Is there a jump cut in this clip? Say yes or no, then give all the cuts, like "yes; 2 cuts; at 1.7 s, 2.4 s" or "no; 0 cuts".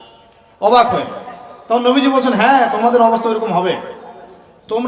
no; 0 cuts